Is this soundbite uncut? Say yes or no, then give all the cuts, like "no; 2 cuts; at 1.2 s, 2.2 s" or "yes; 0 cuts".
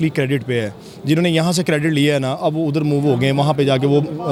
yes; 0 cuts